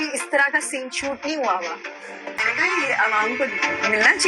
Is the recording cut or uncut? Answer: cut